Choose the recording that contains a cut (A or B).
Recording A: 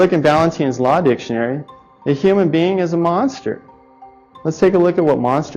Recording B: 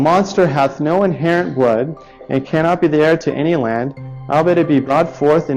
A